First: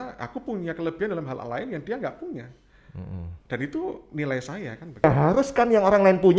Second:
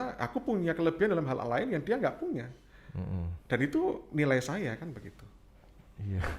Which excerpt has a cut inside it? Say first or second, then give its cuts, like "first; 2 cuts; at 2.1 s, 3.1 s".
first; 1 cut; at 5.0 s